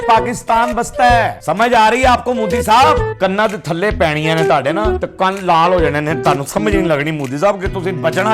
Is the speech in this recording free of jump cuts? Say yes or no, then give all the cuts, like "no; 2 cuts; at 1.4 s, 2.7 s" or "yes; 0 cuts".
no; 3 cuts; at 1.4 s, 3.1 s, 5.0 s